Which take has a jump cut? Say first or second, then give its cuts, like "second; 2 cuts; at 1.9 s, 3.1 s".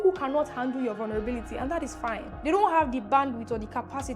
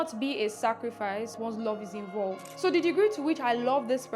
second; 2 cuts; at 1.4 s, 2.5 s